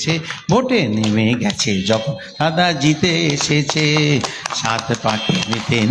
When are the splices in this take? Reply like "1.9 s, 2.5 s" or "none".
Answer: none